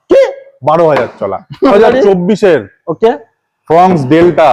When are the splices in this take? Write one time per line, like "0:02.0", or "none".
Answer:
0:01.7